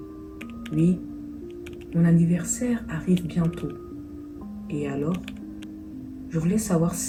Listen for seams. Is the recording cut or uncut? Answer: uncut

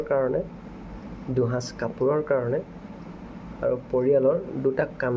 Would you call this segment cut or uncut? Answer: uncut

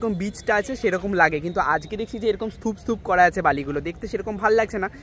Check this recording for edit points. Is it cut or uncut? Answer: uncut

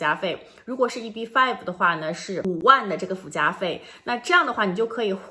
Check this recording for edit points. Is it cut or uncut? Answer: uncut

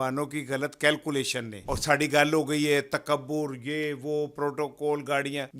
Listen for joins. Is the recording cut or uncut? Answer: cut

